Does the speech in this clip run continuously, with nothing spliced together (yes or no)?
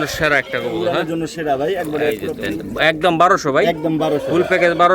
no